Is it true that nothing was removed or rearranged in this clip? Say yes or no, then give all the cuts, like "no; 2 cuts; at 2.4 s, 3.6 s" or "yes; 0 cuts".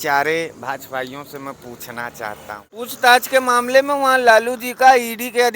no; 1 cut; at 2.7 s